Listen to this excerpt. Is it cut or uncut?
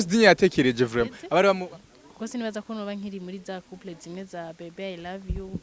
cut